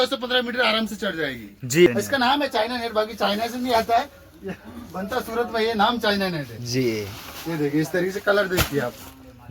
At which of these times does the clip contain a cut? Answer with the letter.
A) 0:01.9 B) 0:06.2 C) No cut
A